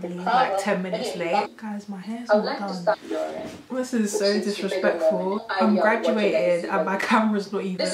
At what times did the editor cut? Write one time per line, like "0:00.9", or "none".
0:01.5
0:03.2
0:05.4